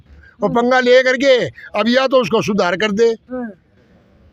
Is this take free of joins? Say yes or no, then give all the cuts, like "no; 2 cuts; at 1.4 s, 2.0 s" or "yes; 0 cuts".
yes; 0 cuts